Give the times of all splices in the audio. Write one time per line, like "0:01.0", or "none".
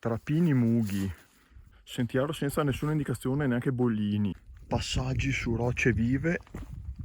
0:04.3